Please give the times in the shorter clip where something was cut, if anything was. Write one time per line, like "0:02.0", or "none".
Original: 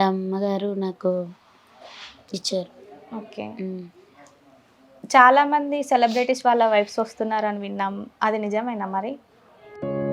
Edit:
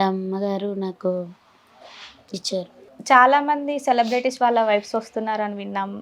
0:02.9